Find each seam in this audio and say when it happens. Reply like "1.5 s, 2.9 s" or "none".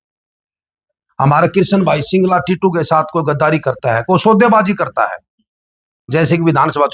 none